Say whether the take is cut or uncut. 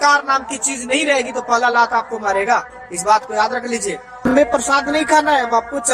cut